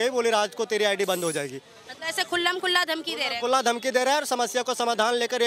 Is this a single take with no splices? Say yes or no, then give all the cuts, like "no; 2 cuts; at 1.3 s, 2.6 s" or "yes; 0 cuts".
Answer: yes; 0 cuts